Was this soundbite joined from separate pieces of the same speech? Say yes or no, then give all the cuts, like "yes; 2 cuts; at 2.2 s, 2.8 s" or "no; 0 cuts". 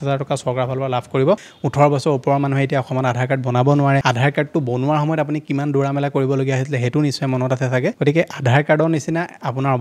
yes; 3 cuts; at 1.5 s, 4.0 s, 8.0 s